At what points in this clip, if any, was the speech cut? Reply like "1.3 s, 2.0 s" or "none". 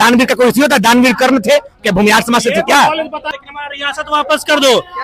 3.2 s